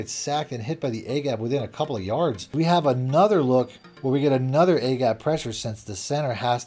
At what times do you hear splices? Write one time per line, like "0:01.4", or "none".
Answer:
0:02.5